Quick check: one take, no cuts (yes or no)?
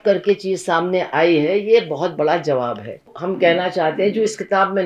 no